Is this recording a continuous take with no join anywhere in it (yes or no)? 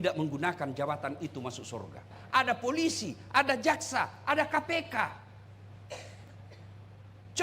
no